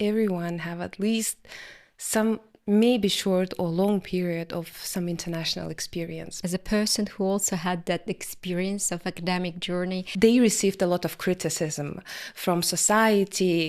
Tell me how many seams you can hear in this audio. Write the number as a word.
two